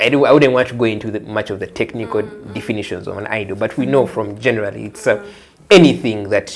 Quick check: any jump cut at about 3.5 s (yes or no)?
no